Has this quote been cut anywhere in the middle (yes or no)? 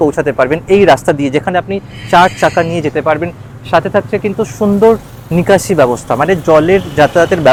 no